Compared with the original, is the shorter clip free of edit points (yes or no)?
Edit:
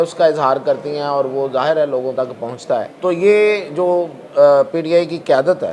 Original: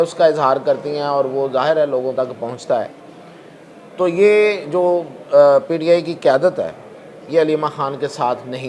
no